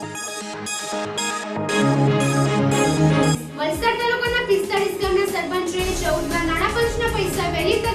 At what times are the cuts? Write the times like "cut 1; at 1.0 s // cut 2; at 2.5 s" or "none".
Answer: cut 1; at 3.2 s